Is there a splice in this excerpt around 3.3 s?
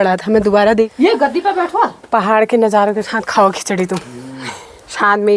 no; 1 cut; at 0.9 s

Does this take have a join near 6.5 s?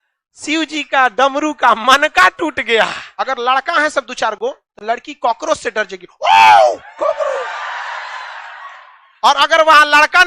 no; 1 cut; at 3.0 s

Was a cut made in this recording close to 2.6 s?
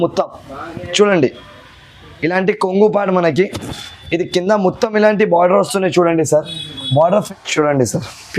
no; 1 cut; at 7.3 s

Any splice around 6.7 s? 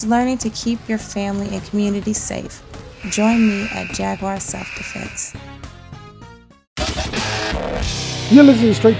yes; 1 cut; at 6.7 s

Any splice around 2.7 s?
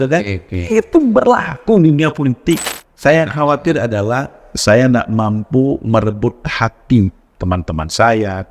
yes; 1 cut; at 2.7 s

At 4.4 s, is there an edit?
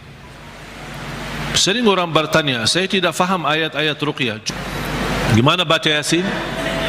yes; 1 cut; at 4.4 s

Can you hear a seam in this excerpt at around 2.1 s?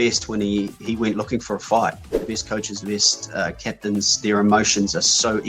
yes; 1 cut; at 2.1 s

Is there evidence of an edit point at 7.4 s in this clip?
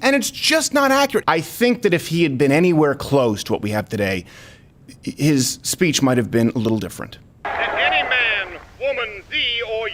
yes; 2 cuts; at 1.2 s, 7.4 s

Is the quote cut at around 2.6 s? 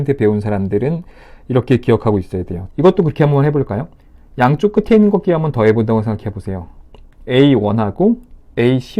yes; 1 cut; at 2.6 s

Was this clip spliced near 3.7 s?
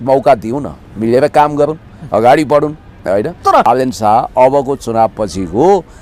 yes; 1 cut; at 3.7 s

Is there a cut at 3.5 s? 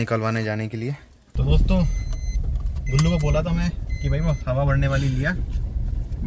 no; 1 cut; at 1.3 s

